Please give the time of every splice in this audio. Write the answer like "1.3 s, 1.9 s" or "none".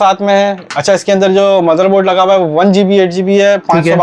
none